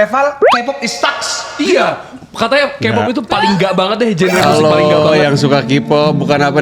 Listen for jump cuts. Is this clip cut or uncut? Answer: uncut